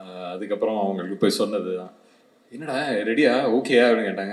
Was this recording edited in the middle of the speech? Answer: no; 0 cuts

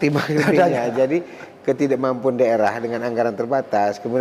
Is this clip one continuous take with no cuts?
yes; 0 cuts

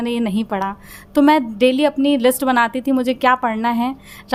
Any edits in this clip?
no; 0 cuts

